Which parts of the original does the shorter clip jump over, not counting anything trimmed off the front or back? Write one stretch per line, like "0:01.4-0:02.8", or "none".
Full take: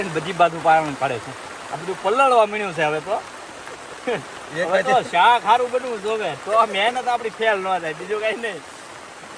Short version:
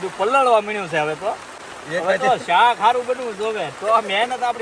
0:03.6-0:04.4